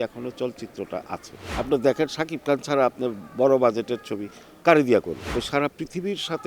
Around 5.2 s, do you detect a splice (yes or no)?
yes